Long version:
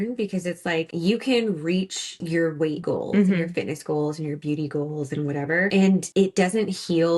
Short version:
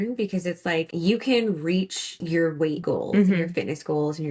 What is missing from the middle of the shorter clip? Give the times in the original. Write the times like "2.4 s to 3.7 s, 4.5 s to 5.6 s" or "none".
none